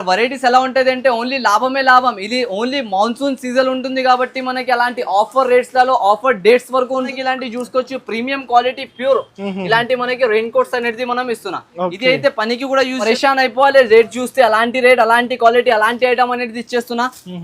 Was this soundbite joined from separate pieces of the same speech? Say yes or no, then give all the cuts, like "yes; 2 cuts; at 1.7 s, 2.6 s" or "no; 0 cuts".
yes; 2 cuts; at 7.1 s, 13.0 s